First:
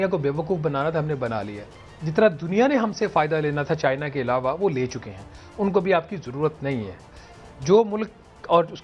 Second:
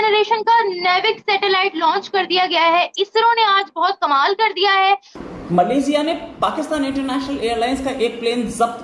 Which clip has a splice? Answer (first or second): second